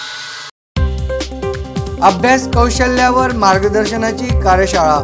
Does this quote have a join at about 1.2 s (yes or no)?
yes